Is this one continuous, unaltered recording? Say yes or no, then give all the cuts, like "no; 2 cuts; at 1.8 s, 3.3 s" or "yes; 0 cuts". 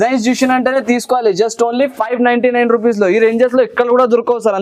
yes; 0 cuts